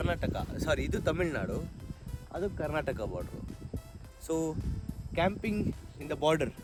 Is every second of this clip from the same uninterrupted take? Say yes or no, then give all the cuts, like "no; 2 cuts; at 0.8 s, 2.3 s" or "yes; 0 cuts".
yes; 0 cuts